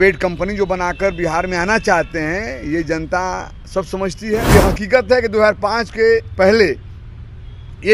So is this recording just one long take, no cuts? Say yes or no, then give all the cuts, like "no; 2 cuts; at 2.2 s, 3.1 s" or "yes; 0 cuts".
no; 1 cut; at 4.4 s